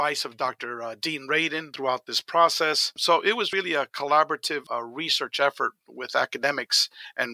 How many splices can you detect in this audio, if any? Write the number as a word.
three